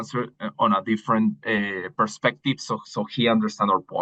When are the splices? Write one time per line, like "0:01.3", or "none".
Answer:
none